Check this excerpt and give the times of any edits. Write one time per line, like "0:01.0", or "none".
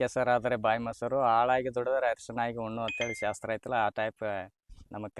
none